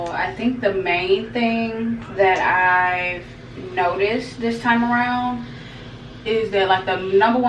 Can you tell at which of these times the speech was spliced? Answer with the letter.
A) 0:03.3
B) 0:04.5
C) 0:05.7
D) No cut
D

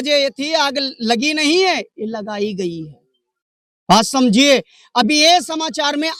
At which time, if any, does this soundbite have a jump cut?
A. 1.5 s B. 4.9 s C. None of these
C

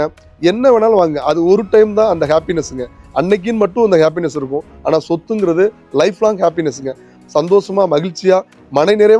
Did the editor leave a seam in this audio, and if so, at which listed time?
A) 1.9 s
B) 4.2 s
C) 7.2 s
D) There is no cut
C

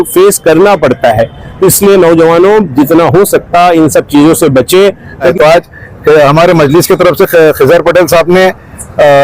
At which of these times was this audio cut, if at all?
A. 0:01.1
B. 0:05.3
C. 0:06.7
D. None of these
B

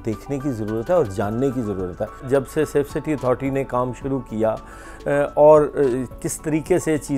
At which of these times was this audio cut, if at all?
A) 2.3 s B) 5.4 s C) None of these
A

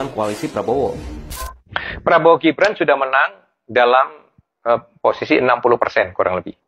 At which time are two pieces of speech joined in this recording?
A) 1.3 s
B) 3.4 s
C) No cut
A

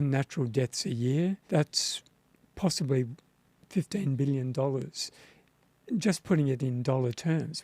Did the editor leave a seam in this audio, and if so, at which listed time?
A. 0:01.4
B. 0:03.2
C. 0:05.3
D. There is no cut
A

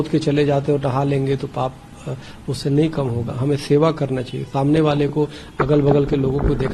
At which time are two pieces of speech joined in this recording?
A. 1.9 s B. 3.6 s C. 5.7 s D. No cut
D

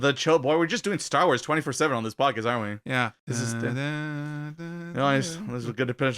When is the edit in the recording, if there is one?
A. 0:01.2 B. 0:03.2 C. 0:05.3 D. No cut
B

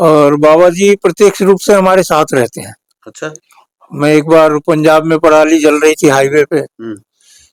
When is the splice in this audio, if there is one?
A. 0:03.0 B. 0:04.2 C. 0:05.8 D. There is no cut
D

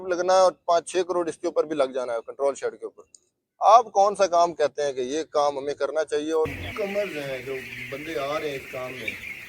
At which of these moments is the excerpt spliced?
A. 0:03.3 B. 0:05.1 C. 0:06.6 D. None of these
C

